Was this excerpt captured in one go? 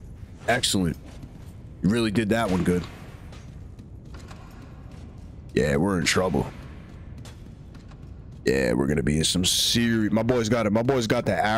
yes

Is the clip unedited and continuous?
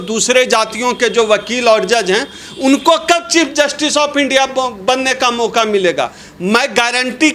yes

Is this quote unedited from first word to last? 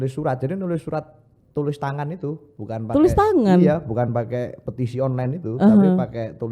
yes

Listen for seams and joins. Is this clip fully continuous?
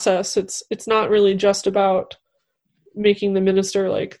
yes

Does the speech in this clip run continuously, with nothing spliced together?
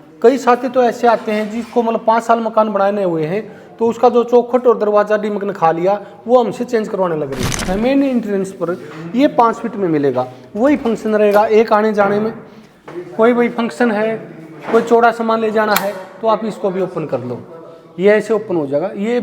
no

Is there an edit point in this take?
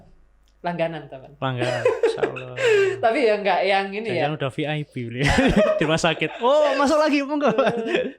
no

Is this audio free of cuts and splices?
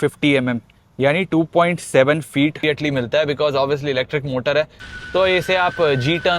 no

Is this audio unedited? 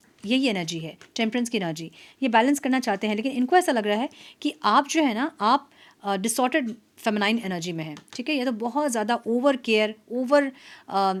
yes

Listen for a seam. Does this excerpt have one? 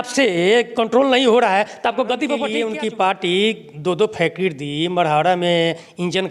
yes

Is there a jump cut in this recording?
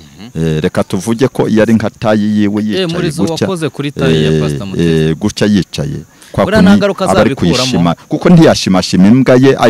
no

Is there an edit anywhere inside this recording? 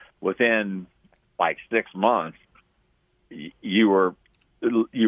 no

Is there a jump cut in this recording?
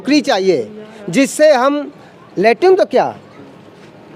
no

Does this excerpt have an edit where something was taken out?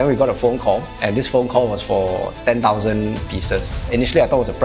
no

